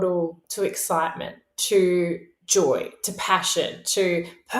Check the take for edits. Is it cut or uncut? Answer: uncut